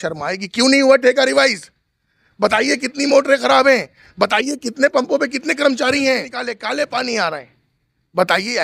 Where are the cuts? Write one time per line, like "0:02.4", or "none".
0:06.5